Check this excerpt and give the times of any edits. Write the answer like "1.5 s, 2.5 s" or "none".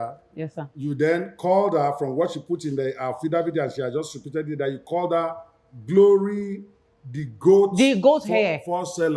none